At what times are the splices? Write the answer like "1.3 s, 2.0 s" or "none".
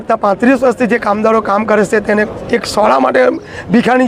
none